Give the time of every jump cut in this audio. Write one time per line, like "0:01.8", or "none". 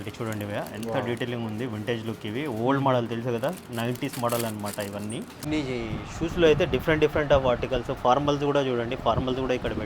0:05.4